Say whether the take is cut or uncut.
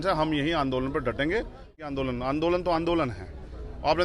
cut